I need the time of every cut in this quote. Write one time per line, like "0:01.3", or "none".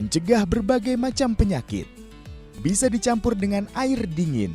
0:02.3